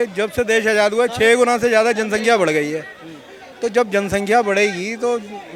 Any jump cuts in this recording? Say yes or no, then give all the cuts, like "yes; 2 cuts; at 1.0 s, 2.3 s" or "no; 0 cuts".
no; 0 cuts